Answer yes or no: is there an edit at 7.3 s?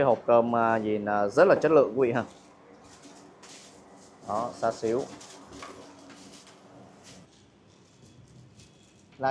yes